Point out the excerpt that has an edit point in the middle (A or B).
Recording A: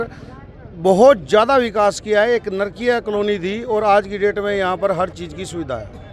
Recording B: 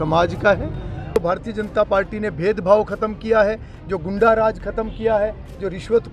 B